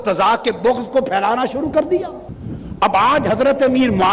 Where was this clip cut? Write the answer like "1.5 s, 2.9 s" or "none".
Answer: none

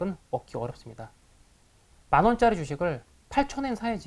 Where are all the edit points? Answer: none

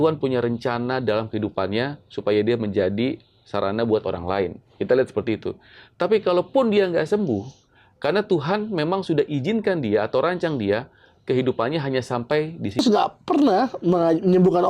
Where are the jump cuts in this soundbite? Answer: 12.8 s

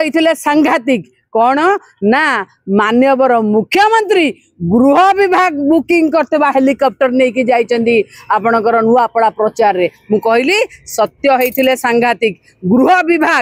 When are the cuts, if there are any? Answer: none

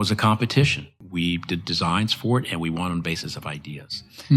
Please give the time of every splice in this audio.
1.0 s

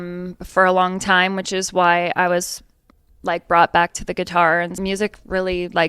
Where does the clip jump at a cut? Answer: 4.7 s

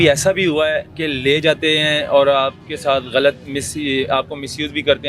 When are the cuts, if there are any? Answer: 0.9 s

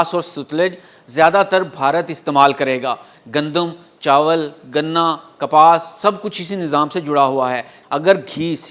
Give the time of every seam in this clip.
3.1 s, 7.7 s

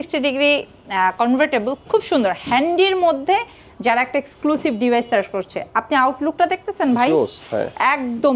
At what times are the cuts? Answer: none

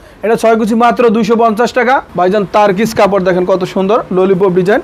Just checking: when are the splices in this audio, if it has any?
2.1 s

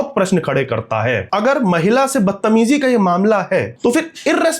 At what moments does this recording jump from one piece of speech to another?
1.2 s, 3.7 s

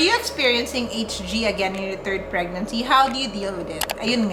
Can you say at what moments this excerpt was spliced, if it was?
none

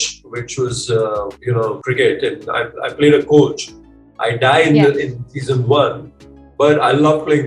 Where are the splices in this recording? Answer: 1.6 s

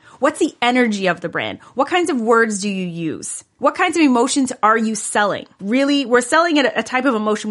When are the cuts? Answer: 5.6 s

